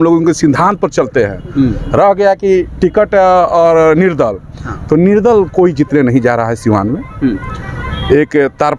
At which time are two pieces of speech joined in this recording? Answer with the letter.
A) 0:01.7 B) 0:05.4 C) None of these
C